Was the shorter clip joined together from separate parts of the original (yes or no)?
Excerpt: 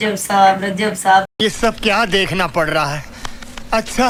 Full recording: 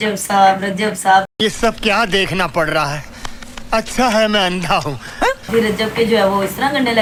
no